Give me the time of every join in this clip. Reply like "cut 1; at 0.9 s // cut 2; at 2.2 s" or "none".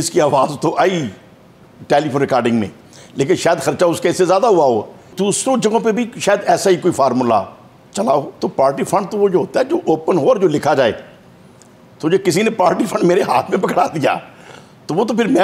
cut 1; at 5.1 s // cut 2; at 8.3 s